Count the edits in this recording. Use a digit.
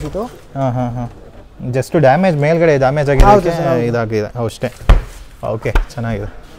0